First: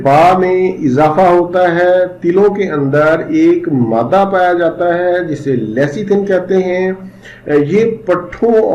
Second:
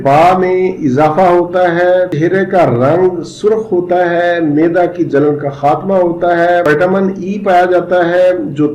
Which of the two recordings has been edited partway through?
second; 2 cuts; at 2.1 s, 6.7 s

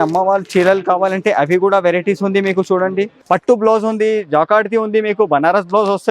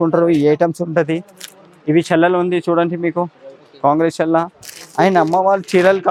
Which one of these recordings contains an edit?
first; 1 cut; at 3.2 s

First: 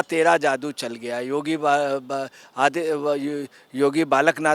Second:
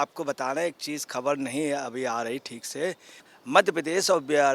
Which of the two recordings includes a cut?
second; 1 cut; at 3.3 s

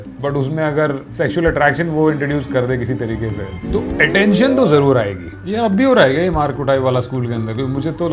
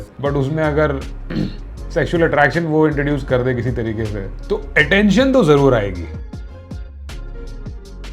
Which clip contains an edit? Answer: first; 2 cuts; at 1.1 s, 5.4 s

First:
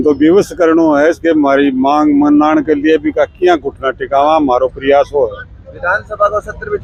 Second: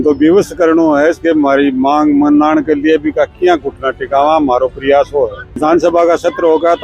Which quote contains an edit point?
second; 1 cut; at 5.6 s

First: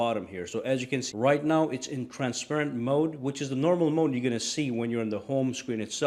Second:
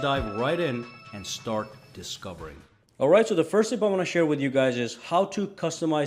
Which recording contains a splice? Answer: first; 1 cut; at 2.7 s

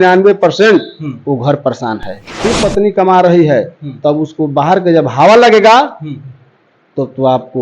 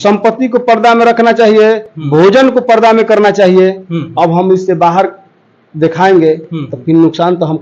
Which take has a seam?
first; 1 cut; at 2.4 s

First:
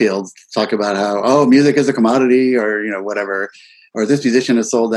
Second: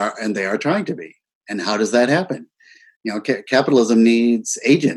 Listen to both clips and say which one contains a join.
second; 1 cut; at 1.3 s

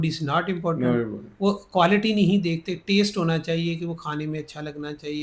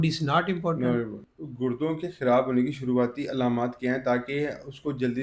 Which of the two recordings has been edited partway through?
second; 1 cut; at 1.2 s

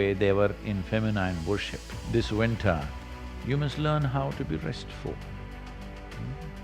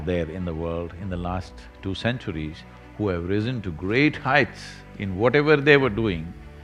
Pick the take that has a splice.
first; 1 cut; at 1.9 s

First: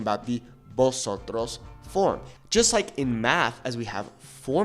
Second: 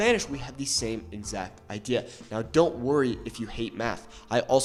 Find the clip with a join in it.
first; 1 cut; at 2.3 s

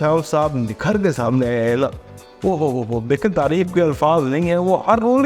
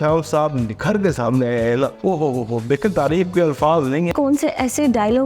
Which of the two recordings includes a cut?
second; 2 cuts; at 2.0 s, 4.1 s

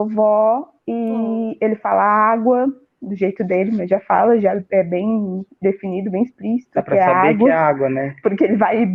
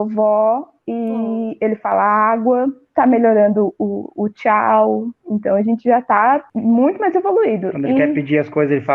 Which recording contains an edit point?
second; 2 cuts; at 2.8 s, 6.5 s

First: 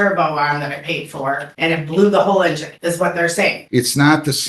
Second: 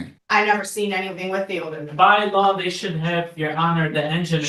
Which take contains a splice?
first; 3 cuts; at 1.5 s, 2.7 s, 3.6 s

